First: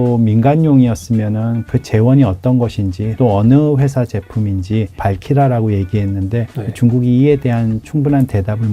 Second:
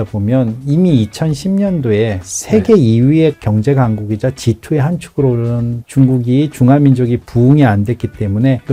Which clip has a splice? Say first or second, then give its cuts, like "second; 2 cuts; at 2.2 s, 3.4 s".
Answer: first; 2 cuts; at 3.0 s, 4.9 s